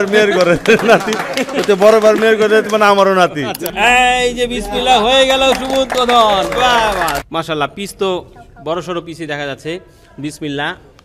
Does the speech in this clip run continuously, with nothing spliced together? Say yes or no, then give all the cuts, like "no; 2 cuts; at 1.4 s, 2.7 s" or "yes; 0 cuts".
no; 2 cuts; at 3.6 s, 7.2 s